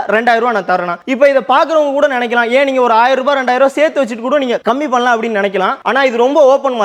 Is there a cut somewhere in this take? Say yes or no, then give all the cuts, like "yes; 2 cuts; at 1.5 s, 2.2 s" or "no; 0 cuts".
no; 0 cuts